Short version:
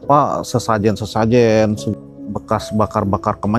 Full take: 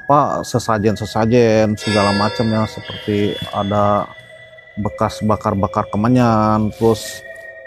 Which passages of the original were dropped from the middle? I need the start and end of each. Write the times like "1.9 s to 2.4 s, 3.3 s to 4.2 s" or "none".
1.8 s to 4.3 s

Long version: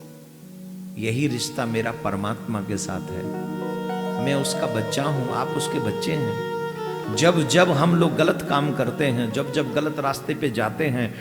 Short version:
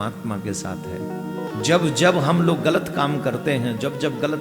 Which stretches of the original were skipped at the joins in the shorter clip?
3.7 s to 7.0 s

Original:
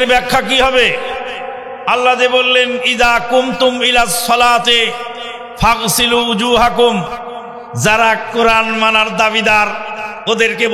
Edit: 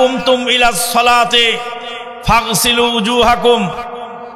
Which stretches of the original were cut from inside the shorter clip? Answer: none

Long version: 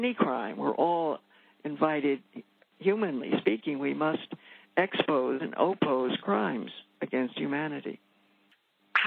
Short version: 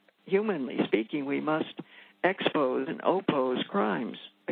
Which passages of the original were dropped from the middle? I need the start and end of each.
none

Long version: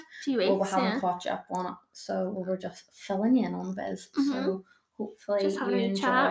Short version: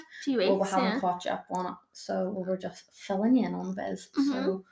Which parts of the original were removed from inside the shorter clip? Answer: none

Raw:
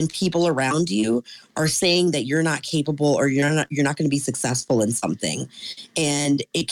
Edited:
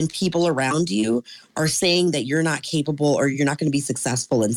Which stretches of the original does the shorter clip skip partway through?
3.3 s to 3.7 s

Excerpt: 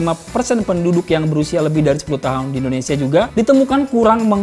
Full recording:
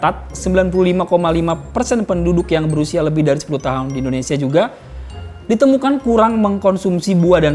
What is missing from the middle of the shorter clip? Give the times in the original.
4.7 s to 5.4 s

